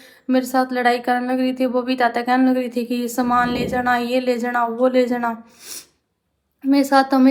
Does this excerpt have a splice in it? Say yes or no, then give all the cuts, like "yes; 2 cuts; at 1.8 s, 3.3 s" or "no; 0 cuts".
no; 0 cuts